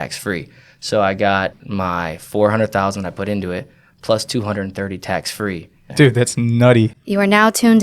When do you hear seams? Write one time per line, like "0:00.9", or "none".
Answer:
0:01.6
0:05.8
0:07.0